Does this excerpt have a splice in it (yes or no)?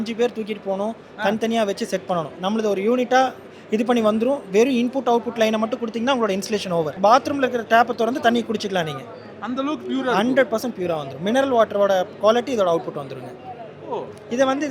yes